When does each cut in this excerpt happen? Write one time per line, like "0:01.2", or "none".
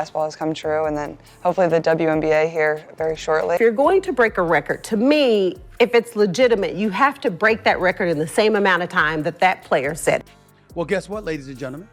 0:03.6
0:10.4